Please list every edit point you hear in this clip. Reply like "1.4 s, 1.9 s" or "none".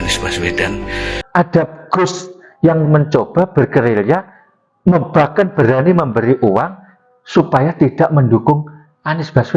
1.2 s